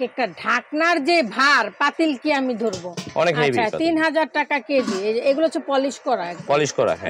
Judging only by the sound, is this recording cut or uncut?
uncut